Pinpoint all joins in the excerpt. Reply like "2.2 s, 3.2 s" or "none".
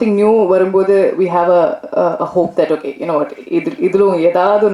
none